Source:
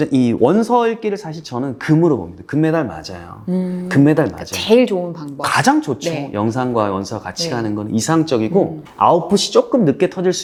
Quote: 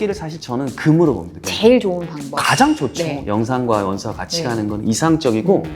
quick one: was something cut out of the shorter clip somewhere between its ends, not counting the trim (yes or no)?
yes